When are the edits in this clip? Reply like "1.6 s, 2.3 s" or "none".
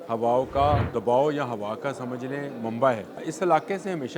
0.9 s, 3.3 s